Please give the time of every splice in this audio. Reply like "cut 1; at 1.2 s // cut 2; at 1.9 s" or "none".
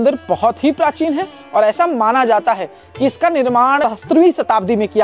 cut 1; at 3.8 s